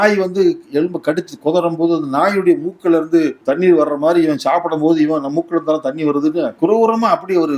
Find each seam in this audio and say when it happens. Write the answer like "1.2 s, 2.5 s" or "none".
3.4 s, 6.5 s